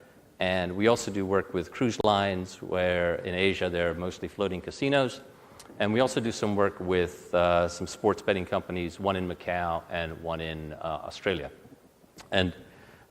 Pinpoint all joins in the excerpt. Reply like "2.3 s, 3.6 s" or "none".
8.2 s